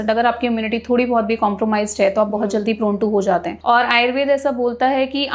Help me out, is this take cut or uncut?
cut